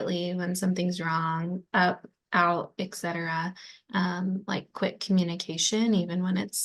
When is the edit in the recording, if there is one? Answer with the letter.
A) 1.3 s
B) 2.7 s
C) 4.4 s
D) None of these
D